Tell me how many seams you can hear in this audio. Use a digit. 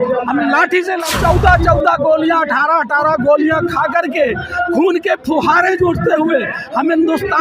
1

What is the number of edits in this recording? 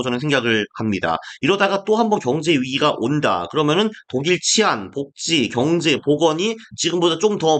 0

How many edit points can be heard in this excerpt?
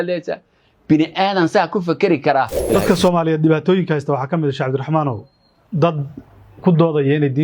1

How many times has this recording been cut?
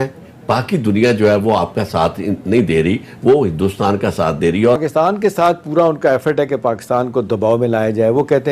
1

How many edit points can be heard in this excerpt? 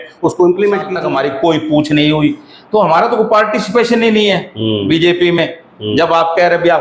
1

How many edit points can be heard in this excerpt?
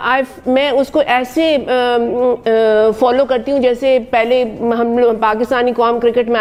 0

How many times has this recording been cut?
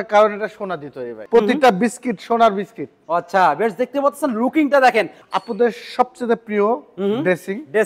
2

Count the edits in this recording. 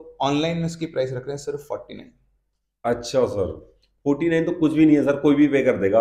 0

